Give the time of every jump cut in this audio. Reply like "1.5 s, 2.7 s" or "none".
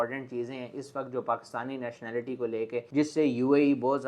none

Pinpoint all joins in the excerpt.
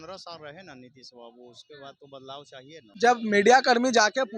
2.8 s

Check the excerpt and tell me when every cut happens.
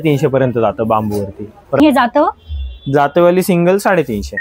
1.8 s

